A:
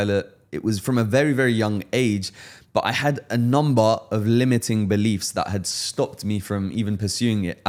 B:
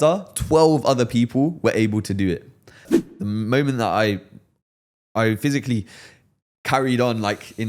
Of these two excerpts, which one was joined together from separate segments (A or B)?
B